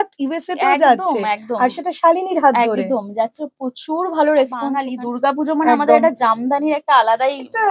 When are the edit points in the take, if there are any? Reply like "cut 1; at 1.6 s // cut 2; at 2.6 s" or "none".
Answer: cut 1; at 4.9 s